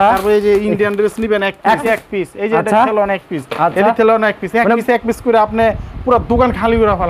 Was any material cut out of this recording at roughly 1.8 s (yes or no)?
yes